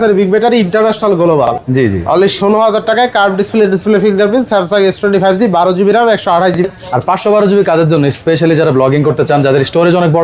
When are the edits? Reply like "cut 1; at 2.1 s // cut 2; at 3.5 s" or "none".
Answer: cut 1; at 1.6 s // cut 2; at 6.6 s